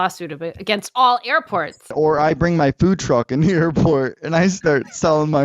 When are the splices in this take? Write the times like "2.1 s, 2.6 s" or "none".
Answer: 1.9 s